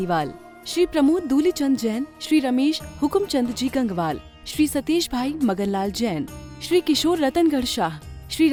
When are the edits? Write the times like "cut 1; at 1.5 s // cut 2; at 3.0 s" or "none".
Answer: none